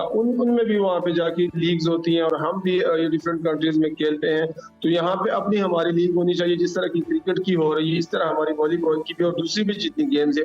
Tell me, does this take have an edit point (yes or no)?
no